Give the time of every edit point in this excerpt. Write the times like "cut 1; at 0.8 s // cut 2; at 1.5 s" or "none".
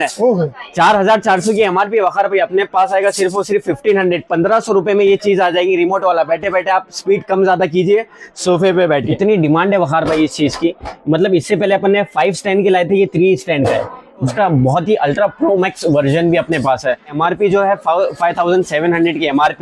cut 1; at 9.1 s // cut 2; at 14.3 s // cut 3; at 17.1 s